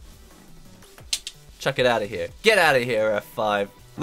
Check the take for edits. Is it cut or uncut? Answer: cut